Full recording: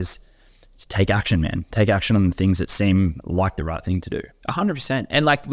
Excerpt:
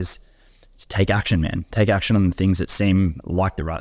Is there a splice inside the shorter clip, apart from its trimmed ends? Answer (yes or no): no